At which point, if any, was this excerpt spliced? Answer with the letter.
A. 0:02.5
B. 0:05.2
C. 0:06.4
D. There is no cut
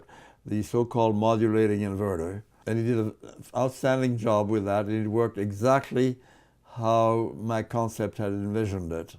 A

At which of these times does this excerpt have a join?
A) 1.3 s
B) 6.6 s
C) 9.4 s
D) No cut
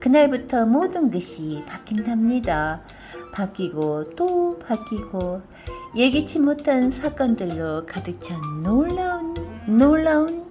C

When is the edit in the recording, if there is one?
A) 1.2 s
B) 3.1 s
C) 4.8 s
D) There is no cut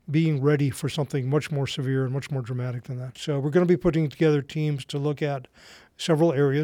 B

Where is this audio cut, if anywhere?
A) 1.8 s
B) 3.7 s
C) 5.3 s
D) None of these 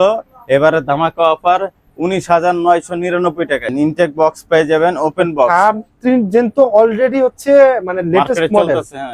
B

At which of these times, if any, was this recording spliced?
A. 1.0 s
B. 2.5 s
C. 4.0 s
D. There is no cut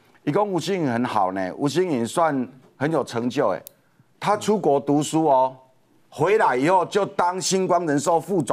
D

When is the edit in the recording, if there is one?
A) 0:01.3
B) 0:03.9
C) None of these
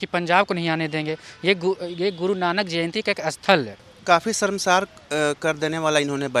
B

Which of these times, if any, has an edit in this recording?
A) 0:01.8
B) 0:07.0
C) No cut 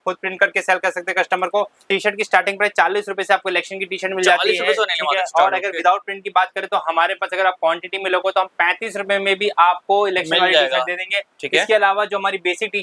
A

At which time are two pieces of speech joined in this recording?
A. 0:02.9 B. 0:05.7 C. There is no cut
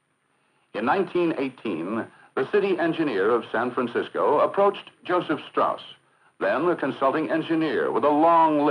A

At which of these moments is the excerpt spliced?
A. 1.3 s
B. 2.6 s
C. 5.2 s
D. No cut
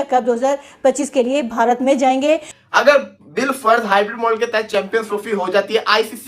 B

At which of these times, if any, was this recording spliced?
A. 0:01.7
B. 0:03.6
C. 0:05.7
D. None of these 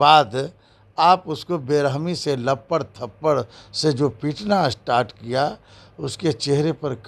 D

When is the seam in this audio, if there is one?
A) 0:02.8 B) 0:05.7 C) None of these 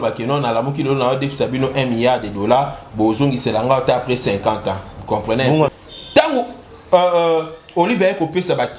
B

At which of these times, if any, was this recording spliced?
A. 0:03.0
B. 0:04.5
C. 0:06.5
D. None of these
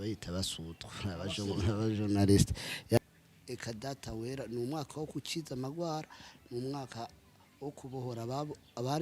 A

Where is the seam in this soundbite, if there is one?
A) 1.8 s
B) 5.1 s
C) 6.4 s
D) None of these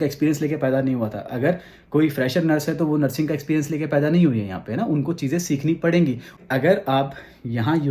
C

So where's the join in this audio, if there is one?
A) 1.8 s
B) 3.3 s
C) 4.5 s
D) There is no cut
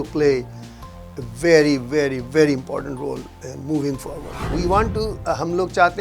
C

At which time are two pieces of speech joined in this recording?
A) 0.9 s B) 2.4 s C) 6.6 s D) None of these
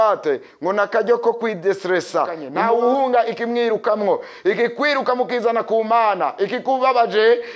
B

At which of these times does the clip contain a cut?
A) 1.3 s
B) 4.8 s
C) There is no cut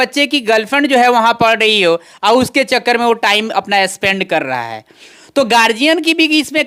C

